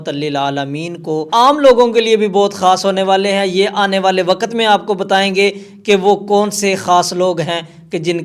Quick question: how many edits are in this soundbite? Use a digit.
1